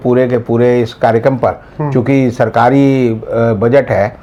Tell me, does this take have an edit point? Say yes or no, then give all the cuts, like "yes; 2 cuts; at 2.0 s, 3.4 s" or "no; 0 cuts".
no; 0 cuts